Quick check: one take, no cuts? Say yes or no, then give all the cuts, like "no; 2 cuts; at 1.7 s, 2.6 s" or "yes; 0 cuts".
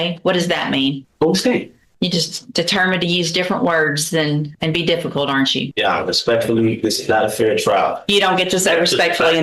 no; 4 cuts; at 1.1 s, 1.8 s, 4.5 s, 5.7 s